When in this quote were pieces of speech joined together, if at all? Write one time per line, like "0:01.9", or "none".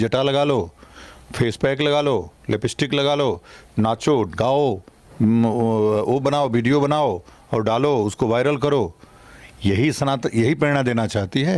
none